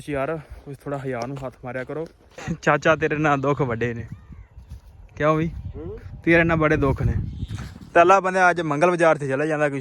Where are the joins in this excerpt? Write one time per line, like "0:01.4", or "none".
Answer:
0:02.3